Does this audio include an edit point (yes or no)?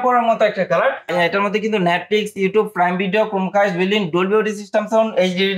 yes